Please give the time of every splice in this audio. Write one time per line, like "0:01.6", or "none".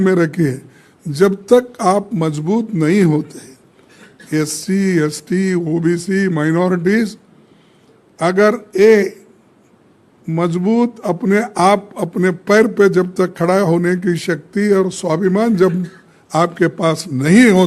none